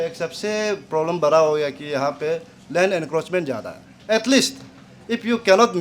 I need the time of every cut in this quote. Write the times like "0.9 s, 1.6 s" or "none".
3.9 s